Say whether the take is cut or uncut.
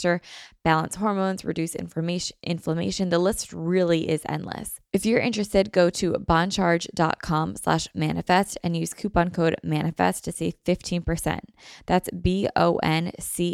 cut